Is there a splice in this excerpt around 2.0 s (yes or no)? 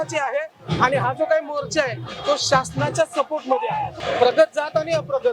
no